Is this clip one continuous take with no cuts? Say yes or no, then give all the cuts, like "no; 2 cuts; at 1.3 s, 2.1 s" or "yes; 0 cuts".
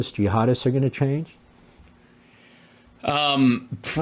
yes; 0 cuts